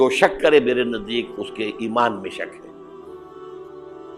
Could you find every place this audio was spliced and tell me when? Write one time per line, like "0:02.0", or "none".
0:02.9